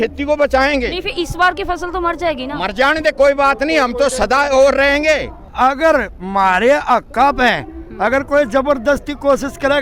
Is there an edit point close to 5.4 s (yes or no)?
yes